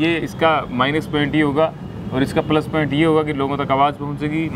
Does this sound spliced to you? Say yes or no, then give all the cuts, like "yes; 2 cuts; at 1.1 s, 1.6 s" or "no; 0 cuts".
no; 0 cuts